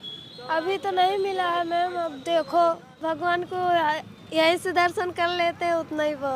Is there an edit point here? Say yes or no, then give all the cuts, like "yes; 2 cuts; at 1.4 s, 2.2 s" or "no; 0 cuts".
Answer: yes; 1 cut; at 3.0 s